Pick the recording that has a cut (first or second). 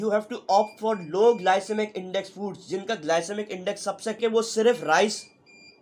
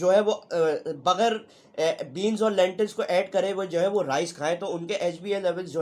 first